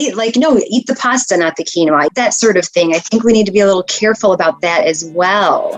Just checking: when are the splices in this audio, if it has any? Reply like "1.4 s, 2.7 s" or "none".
2.1 s

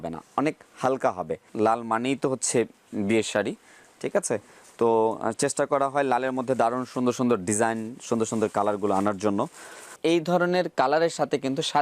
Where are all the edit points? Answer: 1.5 s, 9.9 s

